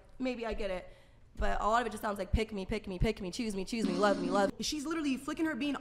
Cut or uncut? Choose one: cut